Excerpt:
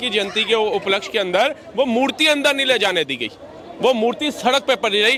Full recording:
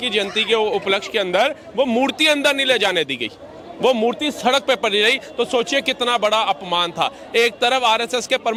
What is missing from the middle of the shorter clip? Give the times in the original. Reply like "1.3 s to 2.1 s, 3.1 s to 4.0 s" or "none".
none